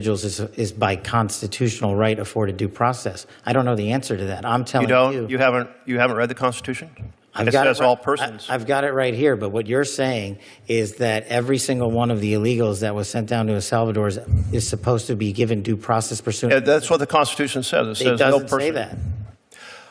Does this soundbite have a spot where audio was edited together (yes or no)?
no